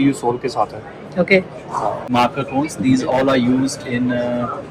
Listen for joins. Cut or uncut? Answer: cut